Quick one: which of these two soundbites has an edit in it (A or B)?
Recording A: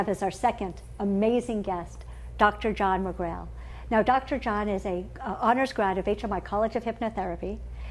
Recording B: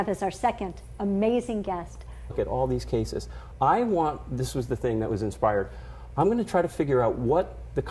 A